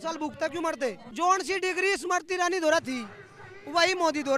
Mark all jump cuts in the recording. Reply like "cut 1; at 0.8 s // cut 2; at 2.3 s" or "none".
cut 1; at 1.1 s